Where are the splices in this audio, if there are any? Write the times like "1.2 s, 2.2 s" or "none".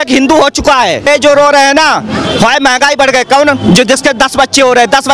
1.1 s